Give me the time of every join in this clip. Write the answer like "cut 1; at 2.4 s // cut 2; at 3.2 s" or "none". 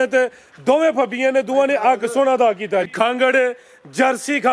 cut 1; at 2.9 s